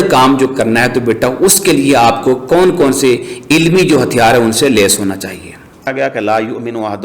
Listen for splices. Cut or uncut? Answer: cut